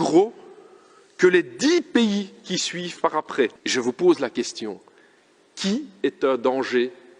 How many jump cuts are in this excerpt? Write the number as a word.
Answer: one